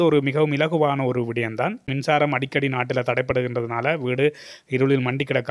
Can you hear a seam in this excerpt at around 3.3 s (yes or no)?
no